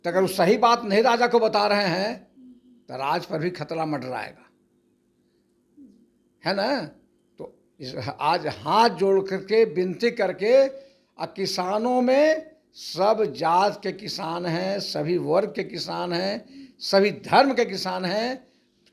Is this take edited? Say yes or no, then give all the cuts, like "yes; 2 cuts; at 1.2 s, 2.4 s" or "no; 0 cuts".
no; 0 cuts